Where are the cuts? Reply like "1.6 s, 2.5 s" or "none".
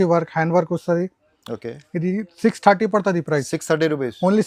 none